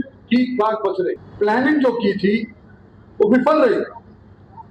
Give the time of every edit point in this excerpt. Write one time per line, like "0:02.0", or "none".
0:01.2